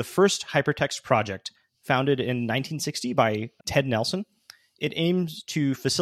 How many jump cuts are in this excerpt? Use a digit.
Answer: 1